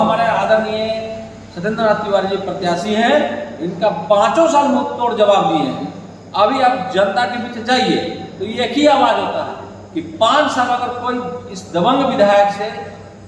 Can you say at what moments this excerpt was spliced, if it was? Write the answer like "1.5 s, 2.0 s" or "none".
none